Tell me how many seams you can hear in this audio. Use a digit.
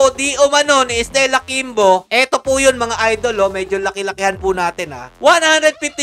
0